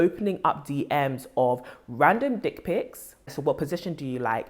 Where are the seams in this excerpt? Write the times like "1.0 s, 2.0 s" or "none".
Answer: 3.3 s